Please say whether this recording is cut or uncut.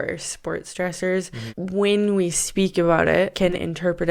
cut